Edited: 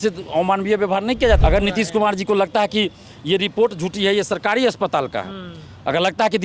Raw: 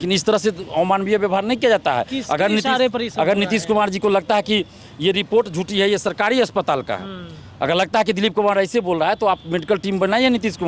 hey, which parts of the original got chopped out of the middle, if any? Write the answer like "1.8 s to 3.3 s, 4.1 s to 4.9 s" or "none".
1.8 s to 3.1 s